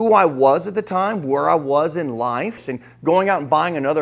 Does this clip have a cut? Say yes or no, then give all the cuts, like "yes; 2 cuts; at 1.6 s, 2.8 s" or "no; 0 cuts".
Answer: yes; 1 cut; at 2.7 s